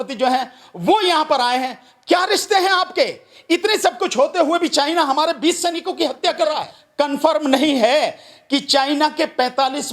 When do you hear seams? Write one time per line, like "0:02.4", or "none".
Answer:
0:06.8